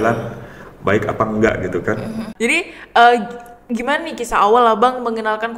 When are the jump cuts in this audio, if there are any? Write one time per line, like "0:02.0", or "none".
0:02.3